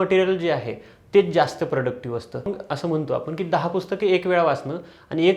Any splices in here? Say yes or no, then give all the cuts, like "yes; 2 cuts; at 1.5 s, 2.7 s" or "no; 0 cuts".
yes; 1 cut; at 2.6 s